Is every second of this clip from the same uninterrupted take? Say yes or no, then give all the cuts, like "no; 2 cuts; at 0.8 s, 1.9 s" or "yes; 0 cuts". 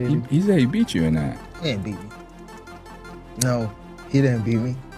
yes; 0 cuts